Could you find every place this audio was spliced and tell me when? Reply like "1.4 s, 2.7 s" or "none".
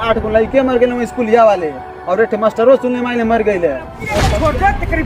4.1 s